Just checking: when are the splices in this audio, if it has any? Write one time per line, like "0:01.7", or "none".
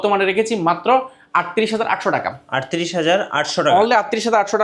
none